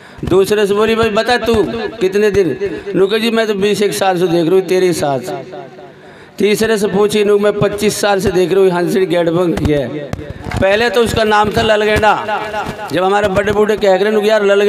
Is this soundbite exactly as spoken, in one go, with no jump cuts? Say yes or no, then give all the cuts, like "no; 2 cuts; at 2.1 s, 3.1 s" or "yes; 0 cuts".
no; 1 cut; at 10.4 s